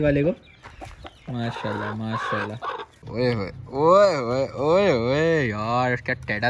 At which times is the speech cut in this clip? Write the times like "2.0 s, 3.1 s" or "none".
3.0 s